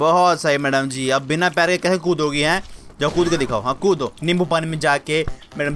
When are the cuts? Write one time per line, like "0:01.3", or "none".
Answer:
0:04.1